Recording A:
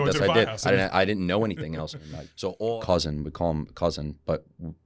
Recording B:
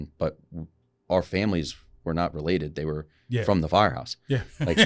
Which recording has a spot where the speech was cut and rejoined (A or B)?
A